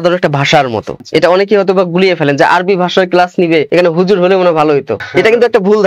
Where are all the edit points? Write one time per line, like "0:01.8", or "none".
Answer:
0:00.9
0:03.7
0:05.0

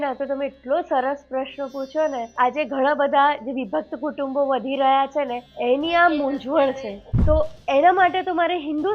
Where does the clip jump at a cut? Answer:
0:02.3
0:05.4
0:06.9

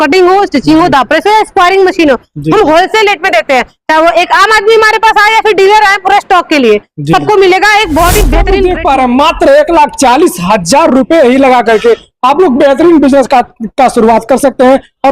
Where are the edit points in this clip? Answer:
0:08.6

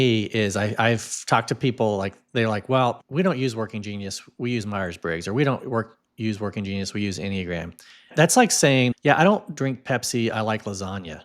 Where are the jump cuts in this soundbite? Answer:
0:03.0
0:08.1
0:08.9

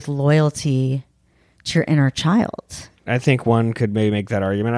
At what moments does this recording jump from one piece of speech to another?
0:03.0

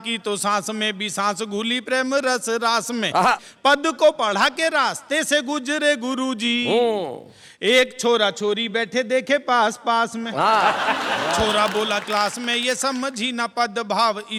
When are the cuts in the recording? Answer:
none

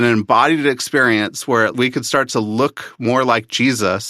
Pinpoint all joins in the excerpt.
0:01.7

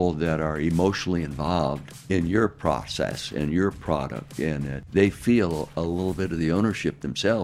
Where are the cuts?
0:01.9
0:04.8

